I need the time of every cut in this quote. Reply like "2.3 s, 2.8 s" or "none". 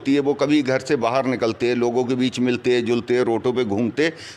2.1 s